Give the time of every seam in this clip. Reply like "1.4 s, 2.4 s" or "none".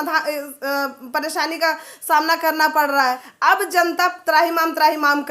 3.3 s